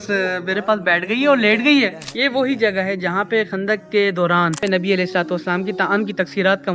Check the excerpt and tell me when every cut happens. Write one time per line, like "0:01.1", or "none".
0:02.1
0:04.6